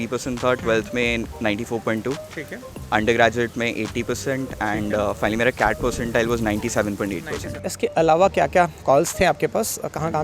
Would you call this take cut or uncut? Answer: cut